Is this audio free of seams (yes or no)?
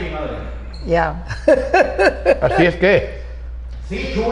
yes